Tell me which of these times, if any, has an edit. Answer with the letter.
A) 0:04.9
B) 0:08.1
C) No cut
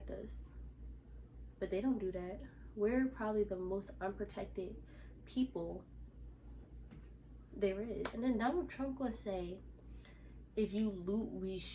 B